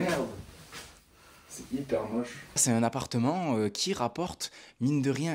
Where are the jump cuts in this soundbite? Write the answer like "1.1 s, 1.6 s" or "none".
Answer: 2.6 s